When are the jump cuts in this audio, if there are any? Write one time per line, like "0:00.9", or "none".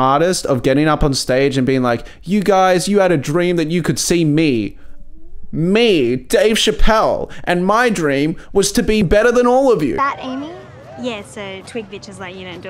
0:09.0
0:10.0